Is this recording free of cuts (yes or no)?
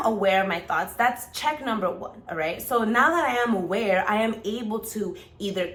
yes